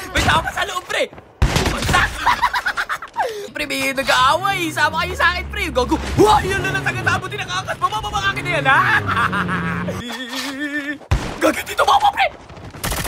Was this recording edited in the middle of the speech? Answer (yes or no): yes